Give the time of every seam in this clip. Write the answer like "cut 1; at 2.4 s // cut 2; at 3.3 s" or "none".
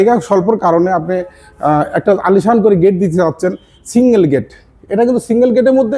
none